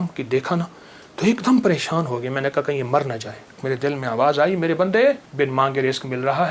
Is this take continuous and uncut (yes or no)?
no